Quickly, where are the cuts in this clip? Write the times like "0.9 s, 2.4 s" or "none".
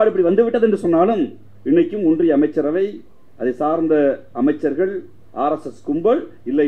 none

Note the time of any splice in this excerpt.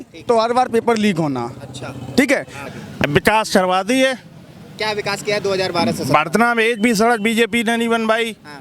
2.6 s

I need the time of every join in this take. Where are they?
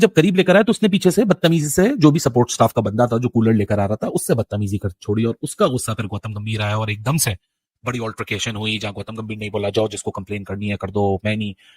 none

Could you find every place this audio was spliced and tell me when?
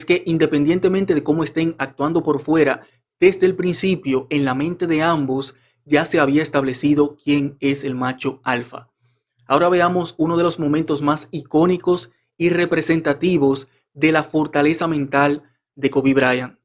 none

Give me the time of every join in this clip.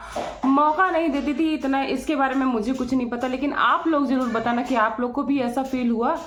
none

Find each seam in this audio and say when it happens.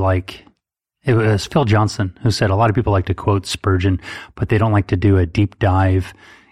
none

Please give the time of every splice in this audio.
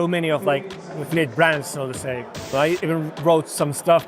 2.5 s

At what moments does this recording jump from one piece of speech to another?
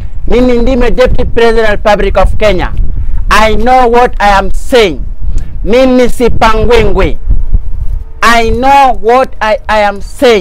none

